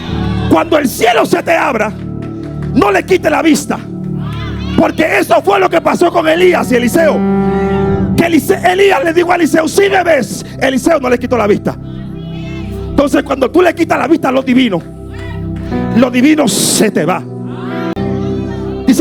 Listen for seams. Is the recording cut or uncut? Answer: uncut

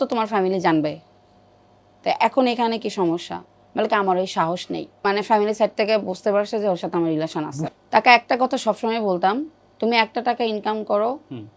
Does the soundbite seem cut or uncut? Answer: cut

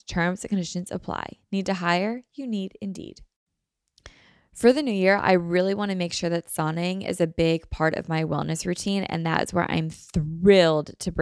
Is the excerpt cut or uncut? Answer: cut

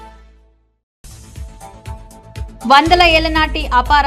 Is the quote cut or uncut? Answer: uncut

